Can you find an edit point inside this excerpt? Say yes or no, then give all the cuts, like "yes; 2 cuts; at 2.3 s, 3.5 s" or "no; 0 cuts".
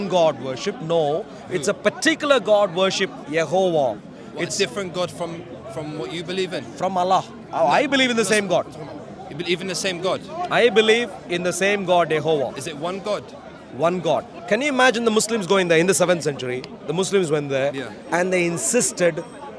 yes; 1 cut; at 14.3 s